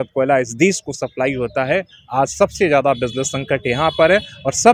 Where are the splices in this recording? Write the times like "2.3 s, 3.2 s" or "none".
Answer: none